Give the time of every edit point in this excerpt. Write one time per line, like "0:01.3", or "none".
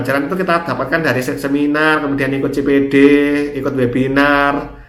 none